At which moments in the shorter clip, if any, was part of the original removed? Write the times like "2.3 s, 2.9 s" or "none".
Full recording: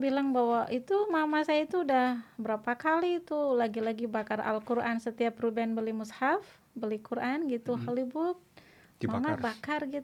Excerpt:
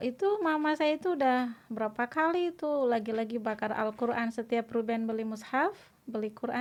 none